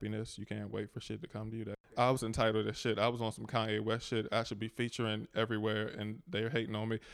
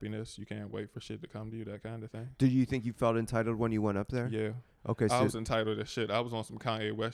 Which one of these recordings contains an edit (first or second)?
first